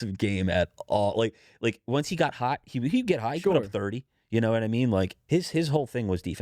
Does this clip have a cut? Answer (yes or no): yes